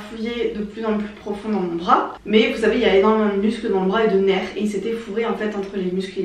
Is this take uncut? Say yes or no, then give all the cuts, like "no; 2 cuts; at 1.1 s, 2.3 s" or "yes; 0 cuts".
yes; 0 cuts